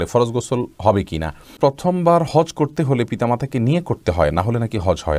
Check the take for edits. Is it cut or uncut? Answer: cut